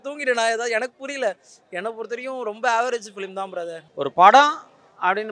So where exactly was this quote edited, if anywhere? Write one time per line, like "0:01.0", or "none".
0:03.8